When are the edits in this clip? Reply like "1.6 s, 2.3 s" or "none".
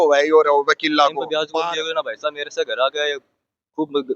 1.4 s